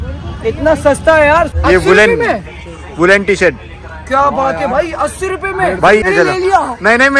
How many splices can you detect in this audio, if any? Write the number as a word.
two